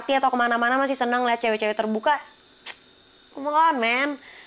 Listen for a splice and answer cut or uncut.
uncut